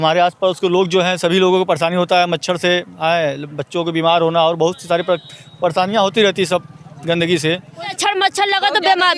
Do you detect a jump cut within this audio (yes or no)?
yes